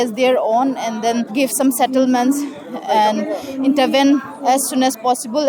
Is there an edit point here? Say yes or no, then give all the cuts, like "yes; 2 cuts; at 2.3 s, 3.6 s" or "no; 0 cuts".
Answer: yes; 2 cuts; at 1.3 s, 4.3 s